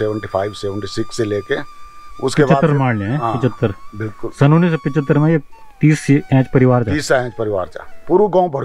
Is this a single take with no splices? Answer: yes; 0 cuts

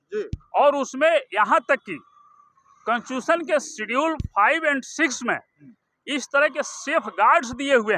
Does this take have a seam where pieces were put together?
no; 0 cuts

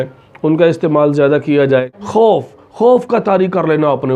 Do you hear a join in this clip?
yes; 1 cut; at 2.0 s

